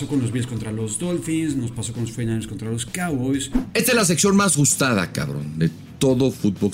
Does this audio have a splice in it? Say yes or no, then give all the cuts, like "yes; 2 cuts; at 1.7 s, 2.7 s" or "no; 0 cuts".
yes; 1 cut; at 3.6 s